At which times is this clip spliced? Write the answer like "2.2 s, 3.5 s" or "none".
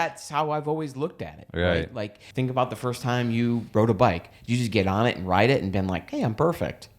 2.2 s